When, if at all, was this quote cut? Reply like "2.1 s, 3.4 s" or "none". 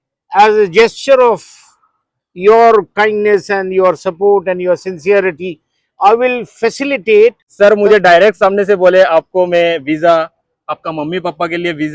7.4 s